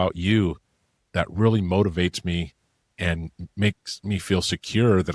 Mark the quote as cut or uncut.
uncut